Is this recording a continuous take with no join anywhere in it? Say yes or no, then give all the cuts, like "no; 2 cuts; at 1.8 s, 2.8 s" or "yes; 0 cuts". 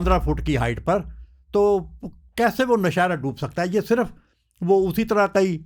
yes; 0 cuts